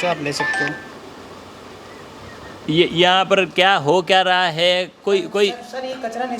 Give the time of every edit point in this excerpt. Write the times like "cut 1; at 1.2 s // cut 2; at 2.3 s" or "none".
none